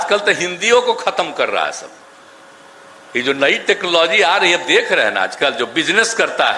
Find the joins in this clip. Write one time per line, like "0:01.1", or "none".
none